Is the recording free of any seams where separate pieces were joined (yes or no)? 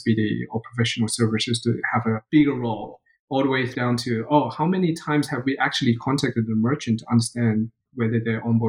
no